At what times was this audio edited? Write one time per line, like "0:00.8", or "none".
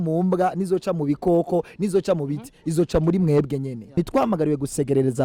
0:03.9